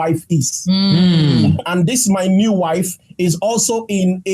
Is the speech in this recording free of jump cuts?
no; 1 cut; at 1.6 s

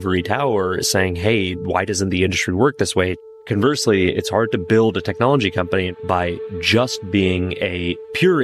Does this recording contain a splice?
yes; 2 cuts; at 3.2 s, 5.9 s

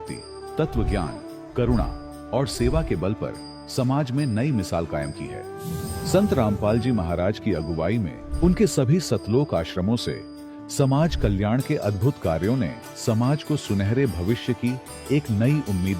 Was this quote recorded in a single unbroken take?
no; 1 cut; at 1.0 s

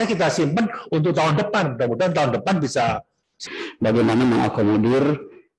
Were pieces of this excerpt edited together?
yes; 1 cut; at 3.4 s

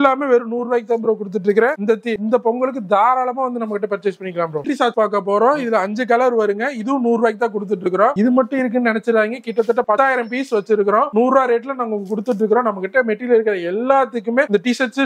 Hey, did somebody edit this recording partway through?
no; 0 cuts

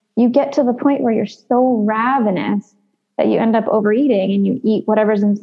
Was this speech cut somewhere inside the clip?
no; 0 cuts

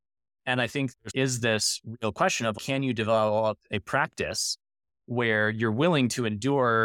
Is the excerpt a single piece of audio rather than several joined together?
no; 2 cuts; at 0.9 s, 2.5 s

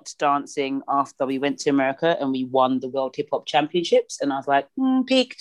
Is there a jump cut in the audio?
no; 0 cuts

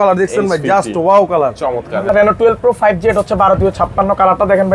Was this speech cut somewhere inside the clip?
yes; 1 cut; at 2.1 s

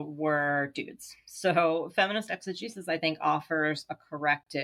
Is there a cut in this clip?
no; 0 cuts

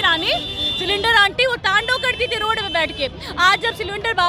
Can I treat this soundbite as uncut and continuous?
yes; 0 cuts

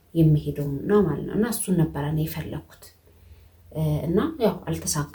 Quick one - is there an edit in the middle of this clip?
no; 0 cuts

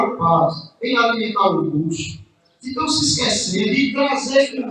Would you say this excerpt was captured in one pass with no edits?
no; 1 cut; at 3.7 s

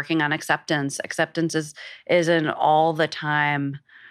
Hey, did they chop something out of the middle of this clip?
no; 0 cuts

